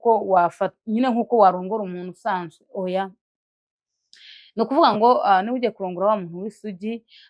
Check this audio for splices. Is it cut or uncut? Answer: uncut